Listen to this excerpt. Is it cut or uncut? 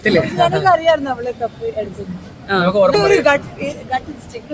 cut